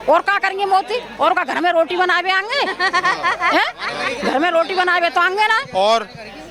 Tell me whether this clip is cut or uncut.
uncut